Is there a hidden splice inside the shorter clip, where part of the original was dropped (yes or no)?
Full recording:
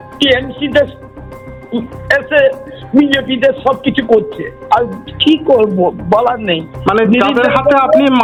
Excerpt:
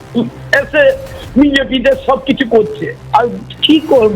no